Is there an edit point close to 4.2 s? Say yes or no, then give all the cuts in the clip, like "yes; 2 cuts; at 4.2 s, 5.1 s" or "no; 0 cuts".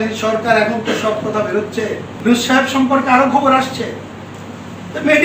no; 1 cut; at 2.1 s